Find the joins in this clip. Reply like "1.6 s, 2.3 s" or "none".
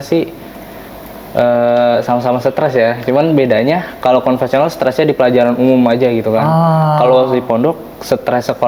none